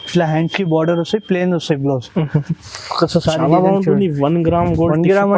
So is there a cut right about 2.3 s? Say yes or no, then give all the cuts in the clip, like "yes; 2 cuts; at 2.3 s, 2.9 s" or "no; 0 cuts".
no; 0 cuts